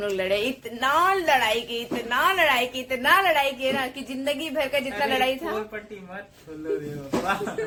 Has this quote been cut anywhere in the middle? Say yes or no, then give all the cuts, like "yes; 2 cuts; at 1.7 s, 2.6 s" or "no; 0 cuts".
no; 0 cuts